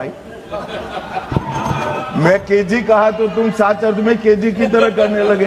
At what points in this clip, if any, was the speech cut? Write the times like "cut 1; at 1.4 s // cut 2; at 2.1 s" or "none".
none